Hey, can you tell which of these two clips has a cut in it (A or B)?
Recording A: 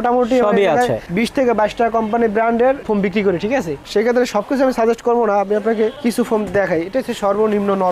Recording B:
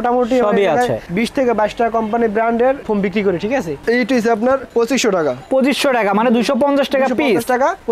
B